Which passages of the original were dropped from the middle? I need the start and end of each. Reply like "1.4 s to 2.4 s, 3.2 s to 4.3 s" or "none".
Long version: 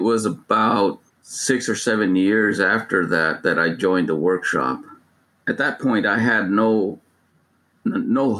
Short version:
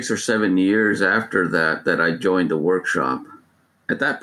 none